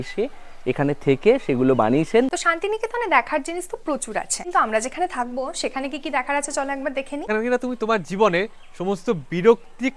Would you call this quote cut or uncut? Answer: cut